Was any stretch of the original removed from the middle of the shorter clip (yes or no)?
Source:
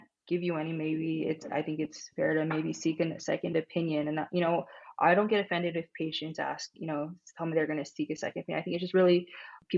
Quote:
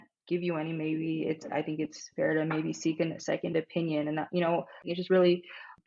yes